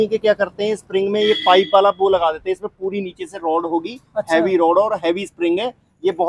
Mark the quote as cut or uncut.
uncut